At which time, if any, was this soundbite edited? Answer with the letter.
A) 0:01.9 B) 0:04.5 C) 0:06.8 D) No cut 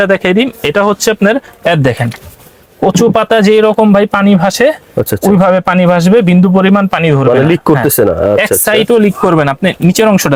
D